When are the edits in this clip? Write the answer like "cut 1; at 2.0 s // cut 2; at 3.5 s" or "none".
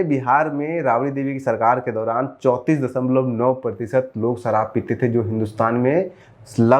none